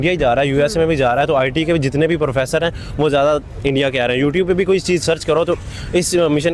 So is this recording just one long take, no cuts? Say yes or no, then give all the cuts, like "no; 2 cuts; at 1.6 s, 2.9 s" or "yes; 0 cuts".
yes; 0 cuts